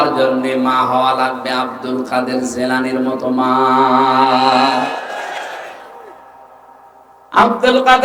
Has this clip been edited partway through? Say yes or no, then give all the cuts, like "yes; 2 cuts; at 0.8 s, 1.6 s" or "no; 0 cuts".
no; 0 cuts